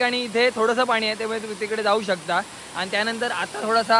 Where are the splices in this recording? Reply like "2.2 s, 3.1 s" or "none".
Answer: none